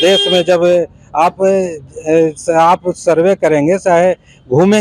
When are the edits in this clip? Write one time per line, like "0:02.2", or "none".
none